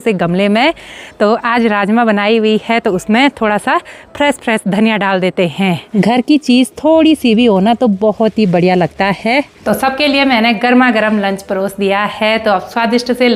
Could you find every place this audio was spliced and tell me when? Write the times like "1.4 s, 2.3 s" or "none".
none